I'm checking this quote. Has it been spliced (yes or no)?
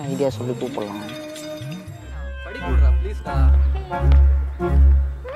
yes